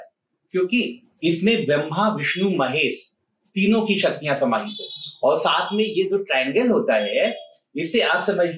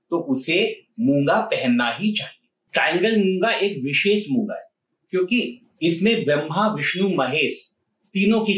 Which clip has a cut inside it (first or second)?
second